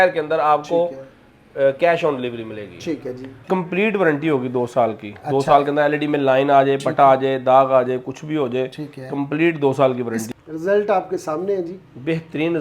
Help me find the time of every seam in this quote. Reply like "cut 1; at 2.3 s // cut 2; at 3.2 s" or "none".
cut 1; at 3.4 s // cut 2; at 10.2 s